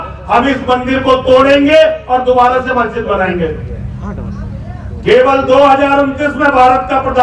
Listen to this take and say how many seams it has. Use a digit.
0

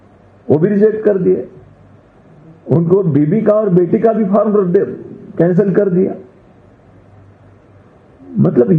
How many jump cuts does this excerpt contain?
0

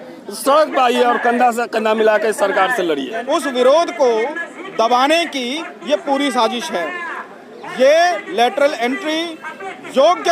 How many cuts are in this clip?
1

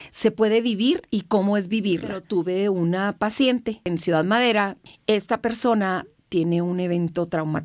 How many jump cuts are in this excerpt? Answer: 3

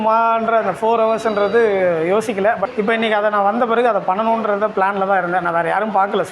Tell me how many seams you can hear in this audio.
1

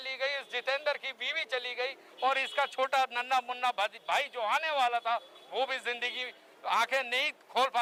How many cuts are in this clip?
0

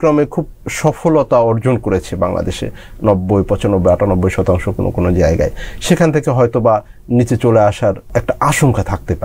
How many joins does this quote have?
1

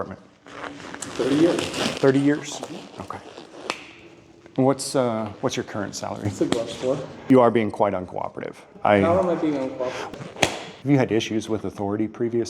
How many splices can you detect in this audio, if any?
2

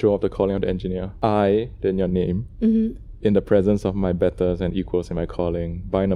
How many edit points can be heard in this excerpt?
1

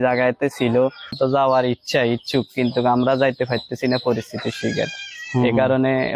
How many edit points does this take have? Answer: 1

